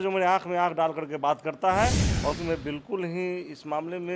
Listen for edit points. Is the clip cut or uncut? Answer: cut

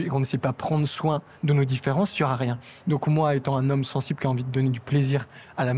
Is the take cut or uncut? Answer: uncut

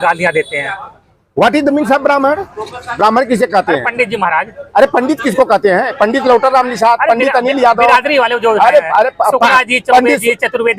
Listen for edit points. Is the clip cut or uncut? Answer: uncut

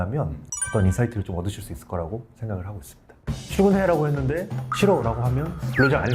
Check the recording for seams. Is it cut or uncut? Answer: cut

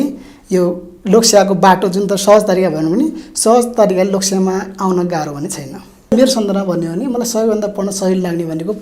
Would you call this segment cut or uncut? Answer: cut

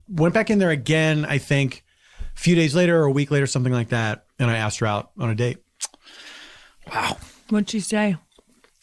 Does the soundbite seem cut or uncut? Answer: uncut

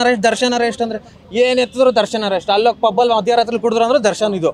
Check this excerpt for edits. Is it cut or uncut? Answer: uncut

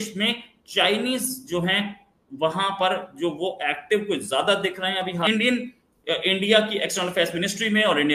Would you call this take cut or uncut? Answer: cut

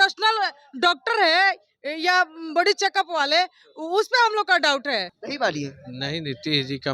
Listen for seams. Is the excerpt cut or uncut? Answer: cut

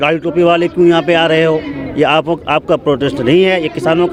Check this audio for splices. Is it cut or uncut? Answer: uncut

